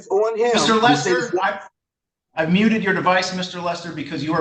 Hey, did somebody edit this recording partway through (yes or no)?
no